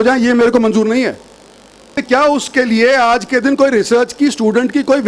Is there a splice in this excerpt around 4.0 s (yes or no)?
no